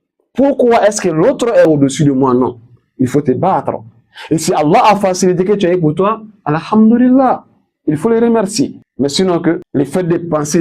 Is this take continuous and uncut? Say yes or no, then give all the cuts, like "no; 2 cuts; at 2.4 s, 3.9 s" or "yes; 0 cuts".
no; 2 cuts; at 8.8 s, 9.6 s